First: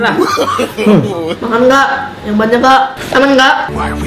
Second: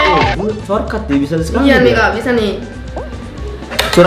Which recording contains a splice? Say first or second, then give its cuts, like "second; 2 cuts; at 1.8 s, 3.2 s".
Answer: first; 1 cut; at 3.0 s